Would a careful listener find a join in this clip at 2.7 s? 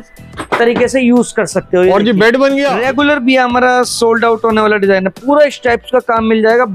yes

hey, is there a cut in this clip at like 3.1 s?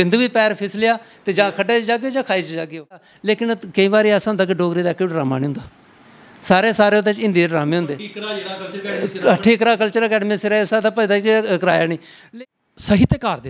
yes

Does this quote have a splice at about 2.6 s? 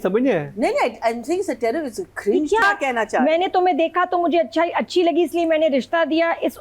yes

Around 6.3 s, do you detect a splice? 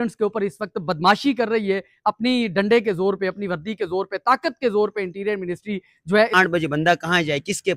yes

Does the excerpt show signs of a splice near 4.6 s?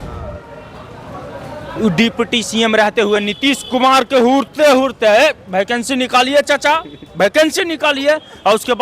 no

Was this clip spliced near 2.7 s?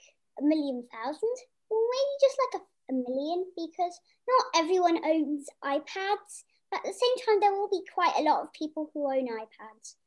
yes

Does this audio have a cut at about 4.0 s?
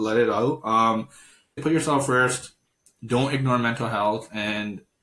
no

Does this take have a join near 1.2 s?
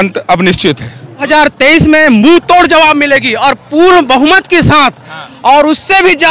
yes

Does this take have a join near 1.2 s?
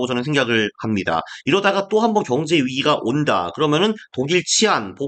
no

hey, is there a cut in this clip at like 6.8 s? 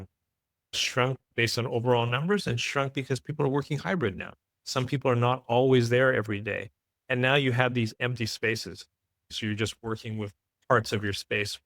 no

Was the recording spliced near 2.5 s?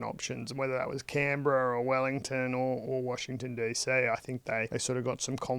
no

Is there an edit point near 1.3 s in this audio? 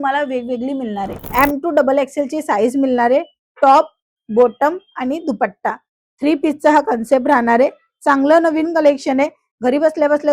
yes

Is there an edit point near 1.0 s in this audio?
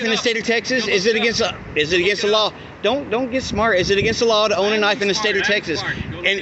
no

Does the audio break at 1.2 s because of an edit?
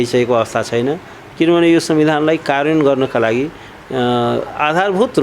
no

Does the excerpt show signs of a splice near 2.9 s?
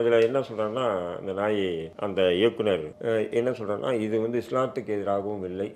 yes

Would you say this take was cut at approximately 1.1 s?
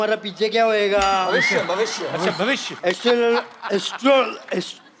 no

